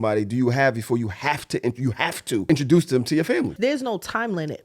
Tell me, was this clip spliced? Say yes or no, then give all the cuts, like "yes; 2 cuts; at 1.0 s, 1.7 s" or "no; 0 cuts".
yes; 2 cuts; at 2.4 s, 3.6 s